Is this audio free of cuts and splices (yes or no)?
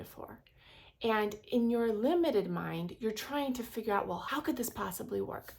no